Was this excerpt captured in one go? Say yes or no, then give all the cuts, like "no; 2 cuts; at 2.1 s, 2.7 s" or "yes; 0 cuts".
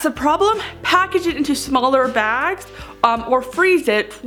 yes; 0 cuts